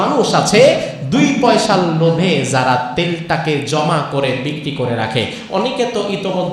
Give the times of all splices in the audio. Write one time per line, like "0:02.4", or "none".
none

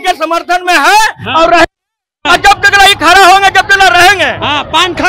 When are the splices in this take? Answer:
none

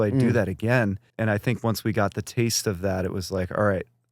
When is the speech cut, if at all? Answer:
0:01.1

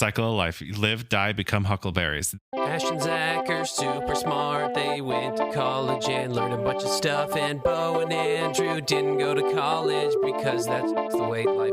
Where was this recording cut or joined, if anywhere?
0:02.4

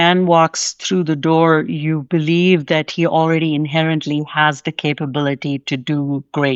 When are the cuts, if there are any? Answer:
none

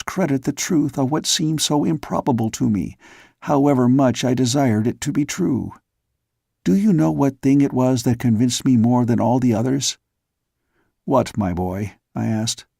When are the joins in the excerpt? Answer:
0:07.4

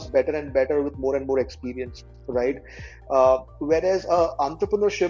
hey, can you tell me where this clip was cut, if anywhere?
none

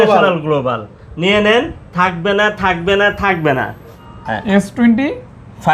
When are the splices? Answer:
0:04.1

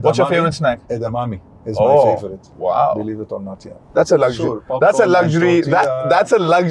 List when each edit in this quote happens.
none

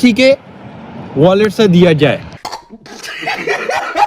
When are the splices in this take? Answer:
none

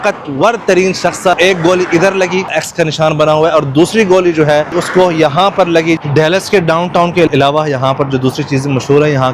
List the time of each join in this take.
0:01.3
0:02.6
0:06.0

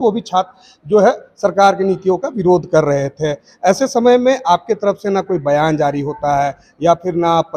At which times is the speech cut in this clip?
none

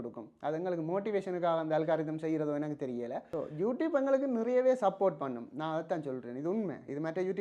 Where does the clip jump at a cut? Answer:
0:03.2

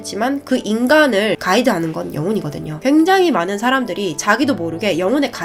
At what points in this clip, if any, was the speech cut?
none

